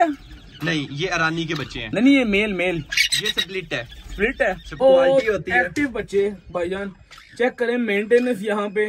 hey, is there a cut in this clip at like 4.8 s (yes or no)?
yes